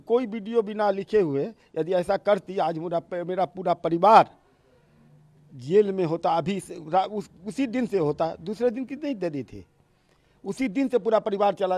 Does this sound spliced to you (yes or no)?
no